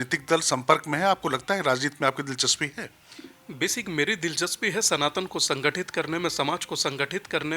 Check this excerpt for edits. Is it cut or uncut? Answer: uncut